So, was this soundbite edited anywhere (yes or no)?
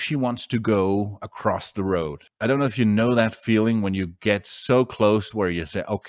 yes